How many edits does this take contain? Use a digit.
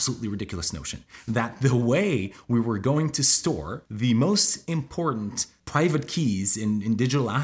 0